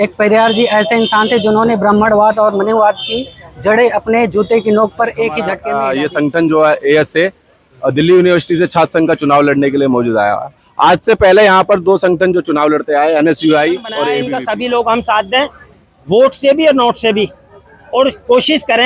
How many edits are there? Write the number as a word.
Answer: two